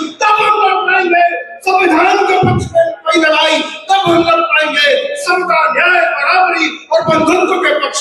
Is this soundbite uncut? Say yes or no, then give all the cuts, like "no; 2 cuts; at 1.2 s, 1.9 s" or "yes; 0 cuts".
yes; 0 cuts